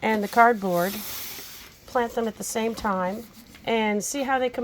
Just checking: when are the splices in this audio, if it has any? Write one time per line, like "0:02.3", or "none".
0:03.3